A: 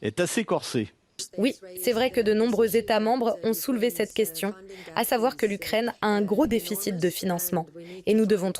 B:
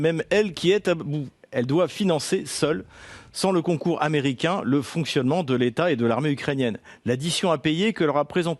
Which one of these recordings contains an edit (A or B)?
A